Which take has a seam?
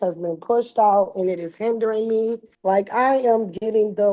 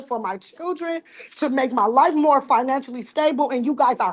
first; 1 cut; at 2.5 s

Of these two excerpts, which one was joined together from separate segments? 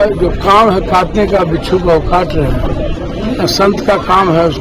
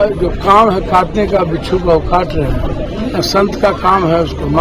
second; 1 cut; at 2.9 s

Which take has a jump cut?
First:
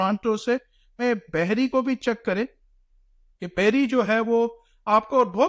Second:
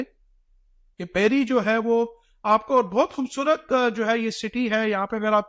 first; 1 cut; at 1.0 s

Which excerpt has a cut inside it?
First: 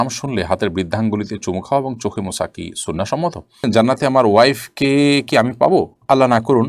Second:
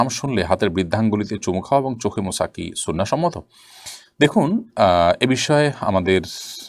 first; 1 cut; at 3.6 s

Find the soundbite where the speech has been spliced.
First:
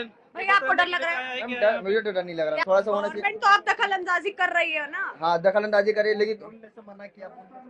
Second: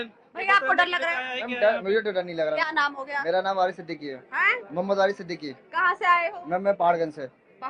first; 1 cut; at 2.6 s

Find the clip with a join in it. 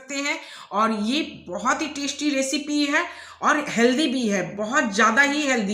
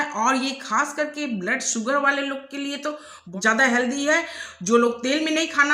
second; 1 cut; at 3.2 s

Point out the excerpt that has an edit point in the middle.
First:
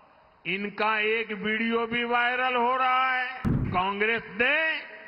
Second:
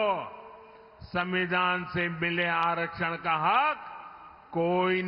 first; 1 cut; at 3.6 s

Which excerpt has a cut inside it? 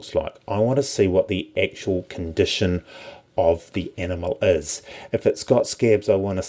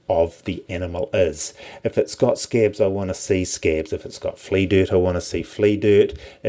first; 1 cut; at 1.5 s

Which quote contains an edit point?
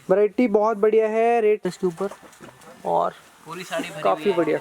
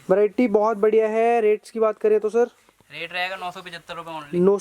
first; 1 cut; at 1.7 s

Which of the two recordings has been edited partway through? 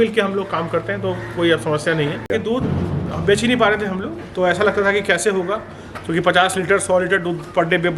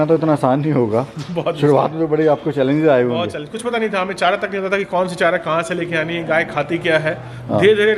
first; 1 cut; at 2.3 s

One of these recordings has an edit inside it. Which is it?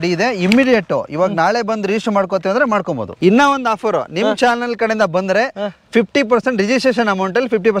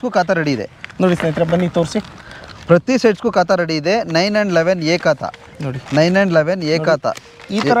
first; 1 cut; at 3.0 s

